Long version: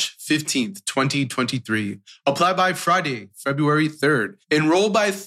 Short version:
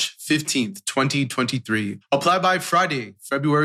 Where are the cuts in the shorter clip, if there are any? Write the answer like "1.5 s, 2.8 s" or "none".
2.0 s